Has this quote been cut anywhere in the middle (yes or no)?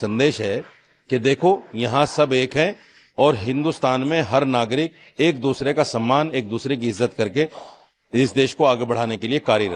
no